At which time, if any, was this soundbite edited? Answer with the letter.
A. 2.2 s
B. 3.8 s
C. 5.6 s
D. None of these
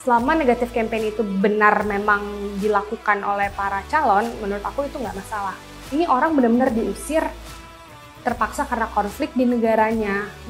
C